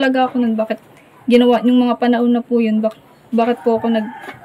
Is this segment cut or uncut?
uncut